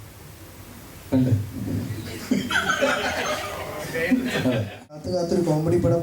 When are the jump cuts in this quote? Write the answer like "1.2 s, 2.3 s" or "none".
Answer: 5.1 s